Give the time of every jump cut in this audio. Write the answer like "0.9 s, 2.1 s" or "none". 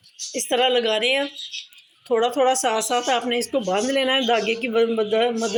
none